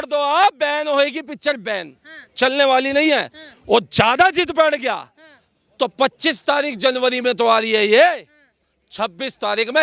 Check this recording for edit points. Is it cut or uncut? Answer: uncut